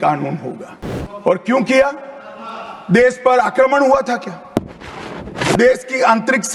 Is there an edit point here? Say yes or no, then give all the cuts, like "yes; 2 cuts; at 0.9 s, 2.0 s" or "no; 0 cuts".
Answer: no; 0 cuts